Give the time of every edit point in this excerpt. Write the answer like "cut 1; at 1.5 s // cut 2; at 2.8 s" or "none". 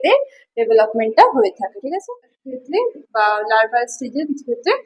cut 1; at 2.4 s